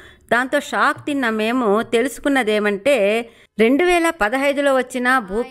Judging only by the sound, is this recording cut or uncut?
uncut